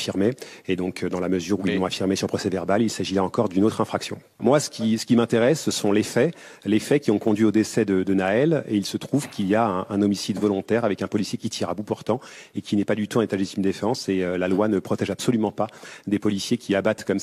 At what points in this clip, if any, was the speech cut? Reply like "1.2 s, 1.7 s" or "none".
4.4 s